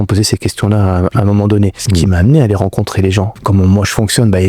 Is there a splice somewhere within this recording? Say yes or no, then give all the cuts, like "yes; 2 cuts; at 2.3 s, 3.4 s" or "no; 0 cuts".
yes; 2 cuts; at 1.8 s, 3.4 s